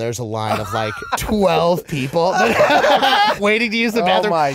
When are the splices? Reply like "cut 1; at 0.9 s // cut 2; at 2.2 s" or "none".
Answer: cut 1; at 1.1 s // cut 2; at 3.4 s